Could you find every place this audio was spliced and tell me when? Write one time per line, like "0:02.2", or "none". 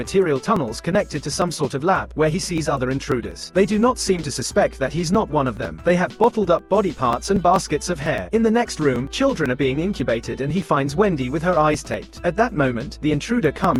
none